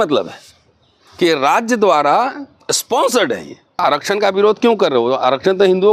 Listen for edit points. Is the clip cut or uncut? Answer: cut